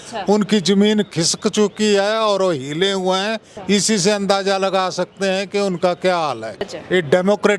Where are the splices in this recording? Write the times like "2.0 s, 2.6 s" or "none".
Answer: 3.5 s, 6.8 s